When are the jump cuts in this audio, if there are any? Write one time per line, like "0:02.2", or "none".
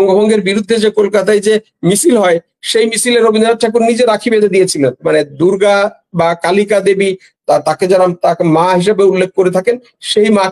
0:05.0